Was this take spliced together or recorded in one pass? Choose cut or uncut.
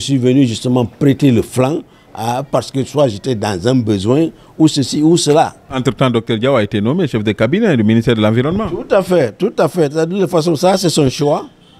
cut